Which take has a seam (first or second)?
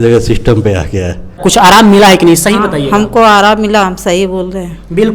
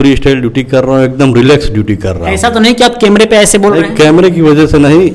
first